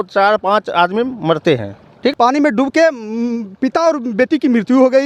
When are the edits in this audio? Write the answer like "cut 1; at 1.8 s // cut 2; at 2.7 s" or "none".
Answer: cut 1; at 2.1 s